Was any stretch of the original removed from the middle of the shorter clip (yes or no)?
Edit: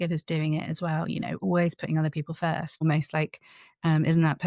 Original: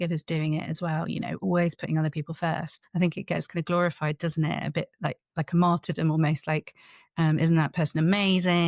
yes